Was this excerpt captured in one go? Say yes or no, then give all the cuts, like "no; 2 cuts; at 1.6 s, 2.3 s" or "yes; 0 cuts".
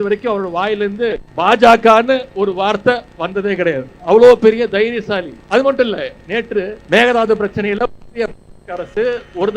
no; 4 cuts; at 1.3 s, 3.9 s, 5.4 s, 6.8 s